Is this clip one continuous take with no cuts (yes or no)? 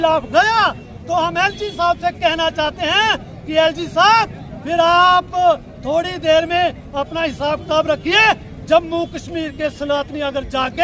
yes